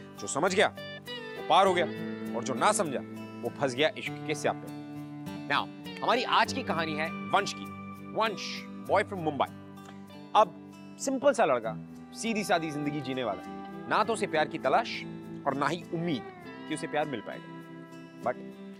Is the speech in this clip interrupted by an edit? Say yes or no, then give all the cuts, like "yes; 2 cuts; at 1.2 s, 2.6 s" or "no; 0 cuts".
no; 0 cuts